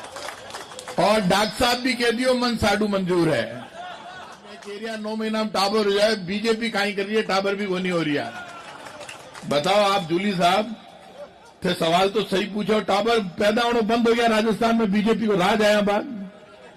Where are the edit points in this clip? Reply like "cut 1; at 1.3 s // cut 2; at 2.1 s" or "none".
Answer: cut 1; at 4.7 s